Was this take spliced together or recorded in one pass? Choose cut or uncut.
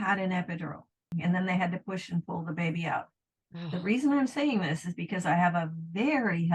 cut